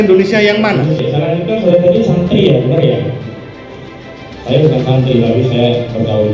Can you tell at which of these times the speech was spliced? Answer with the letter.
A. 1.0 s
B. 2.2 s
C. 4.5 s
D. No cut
A